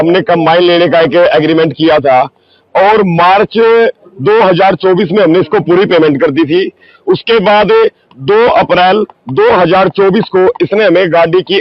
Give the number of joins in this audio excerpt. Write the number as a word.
zero